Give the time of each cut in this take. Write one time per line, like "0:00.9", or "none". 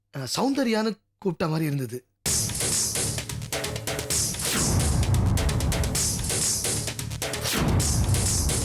none